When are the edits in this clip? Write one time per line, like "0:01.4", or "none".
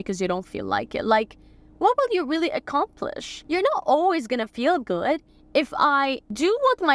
0:03.3
0:05.3

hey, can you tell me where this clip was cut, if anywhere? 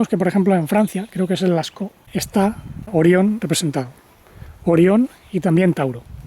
0:02.8

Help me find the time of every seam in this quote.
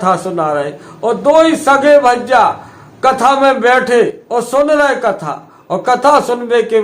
0:04.2

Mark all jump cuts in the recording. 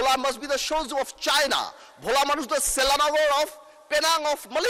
none

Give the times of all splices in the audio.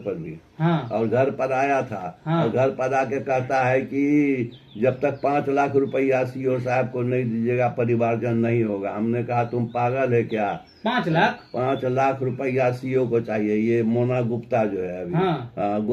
none

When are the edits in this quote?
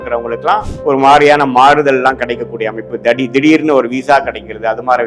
none

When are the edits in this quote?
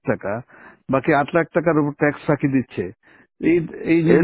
none

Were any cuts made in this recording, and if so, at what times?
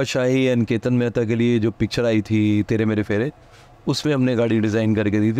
none

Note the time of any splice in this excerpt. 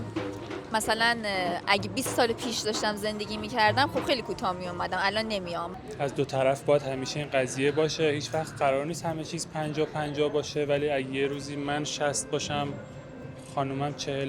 0:05.7

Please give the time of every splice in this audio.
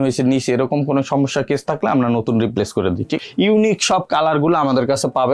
0:03.1

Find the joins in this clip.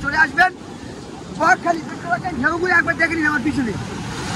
none

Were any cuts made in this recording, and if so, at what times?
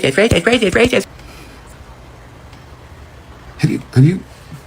0:01.0

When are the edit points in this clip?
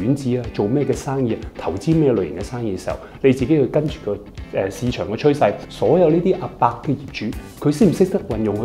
0:05.7

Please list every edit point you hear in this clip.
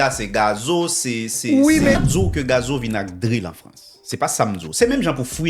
0:02.0

